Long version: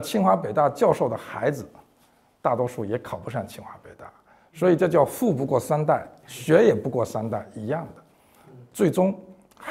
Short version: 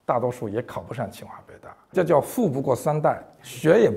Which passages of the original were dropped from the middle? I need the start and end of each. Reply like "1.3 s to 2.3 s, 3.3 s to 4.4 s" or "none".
4.3 s to 4.8 s